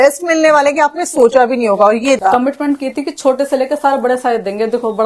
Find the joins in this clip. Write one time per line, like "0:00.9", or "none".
0:02.2